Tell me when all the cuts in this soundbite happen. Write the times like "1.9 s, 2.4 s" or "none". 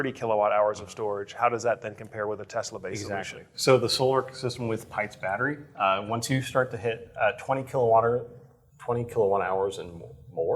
none